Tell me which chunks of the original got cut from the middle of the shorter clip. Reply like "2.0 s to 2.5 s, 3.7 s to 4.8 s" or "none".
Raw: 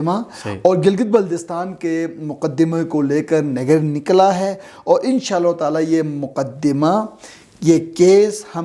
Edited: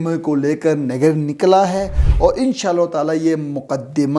none